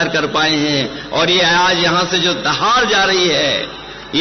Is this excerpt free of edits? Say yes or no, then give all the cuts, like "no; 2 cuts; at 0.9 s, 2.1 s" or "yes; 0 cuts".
yes; 0 cuts